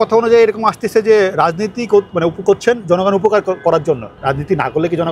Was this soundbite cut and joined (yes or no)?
no